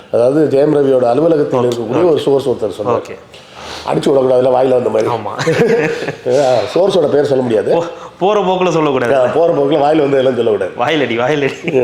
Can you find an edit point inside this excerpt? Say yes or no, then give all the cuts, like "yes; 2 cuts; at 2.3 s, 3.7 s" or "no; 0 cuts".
no; 0 cuts